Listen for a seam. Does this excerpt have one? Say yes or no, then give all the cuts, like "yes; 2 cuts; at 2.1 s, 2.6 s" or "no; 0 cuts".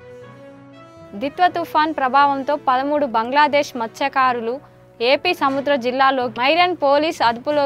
yes; 1 cut; at 1.0 s